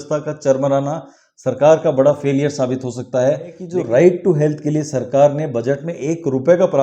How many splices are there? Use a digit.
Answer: 1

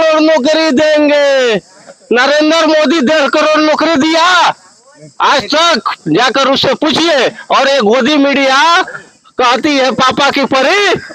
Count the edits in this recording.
0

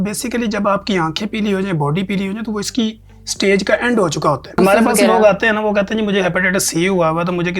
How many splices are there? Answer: 1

